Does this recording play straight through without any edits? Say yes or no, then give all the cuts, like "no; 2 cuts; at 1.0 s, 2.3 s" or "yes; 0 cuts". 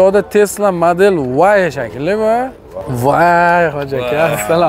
no; 1 cut; at 2.7 s